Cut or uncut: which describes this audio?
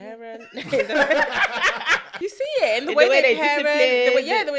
cut